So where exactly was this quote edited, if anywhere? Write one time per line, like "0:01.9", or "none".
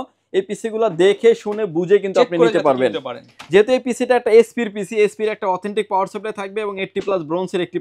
none